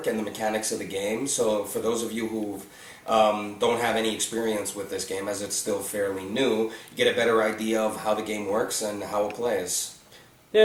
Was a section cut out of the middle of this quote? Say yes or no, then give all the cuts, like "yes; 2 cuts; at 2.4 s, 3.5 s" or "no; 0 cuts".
no; 0 cuts